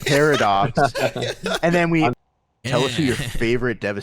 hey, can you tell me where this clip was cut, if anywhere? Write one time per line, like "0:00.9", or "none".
0:02.2